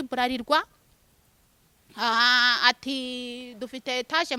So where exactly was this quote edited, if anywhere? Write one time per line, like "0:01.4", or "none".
none